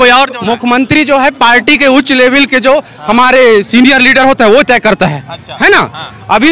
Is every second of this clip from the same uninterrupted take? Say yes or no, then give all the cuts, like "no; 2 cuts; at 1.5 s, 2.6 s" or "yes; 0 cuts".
yes; 0 cuts